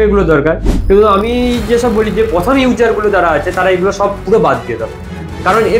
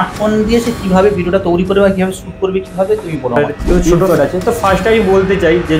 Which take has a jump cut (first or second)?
second